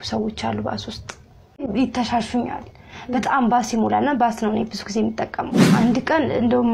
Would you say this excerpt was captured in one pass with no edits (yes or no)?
no